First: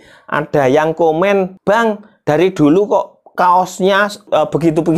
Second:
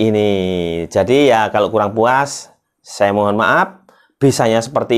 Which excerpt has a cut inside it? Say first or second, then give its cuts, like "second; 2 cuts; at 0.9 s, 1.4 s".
first; 2 cuts; at 1.5 s, 4.3 s